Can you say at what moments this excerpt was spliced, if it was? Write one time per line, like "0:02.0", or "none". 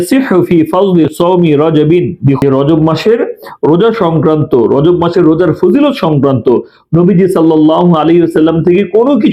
0:02.4

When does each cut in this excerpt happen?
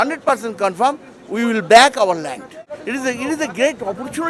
0:02.7

